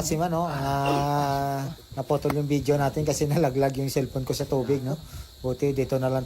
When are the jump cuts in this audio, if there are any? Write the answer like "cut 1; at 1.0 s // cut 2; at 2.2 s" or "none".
none